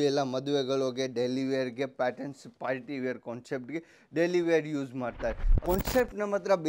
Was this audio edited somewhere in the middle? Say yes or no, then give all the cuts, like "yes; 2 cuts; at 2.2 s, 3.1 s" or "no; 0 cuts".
yes; 1 cut; at 5.5 s